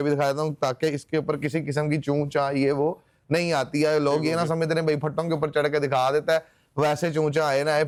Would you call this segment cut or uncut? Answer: uncut